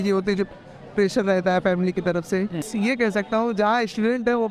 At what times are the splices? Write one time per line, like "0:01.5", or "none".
0:02.7

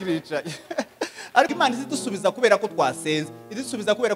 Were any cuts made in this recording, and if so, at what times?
0:01.5

